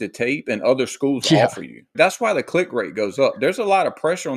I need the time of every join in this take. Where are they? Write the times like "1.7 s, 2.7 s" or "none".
1.9 s